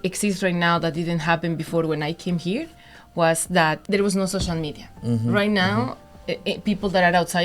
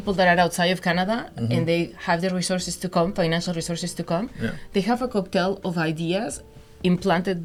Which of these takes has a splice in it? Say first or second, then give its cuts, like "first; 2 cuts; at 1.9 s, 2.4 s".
first; 1 cut; at 3.8 s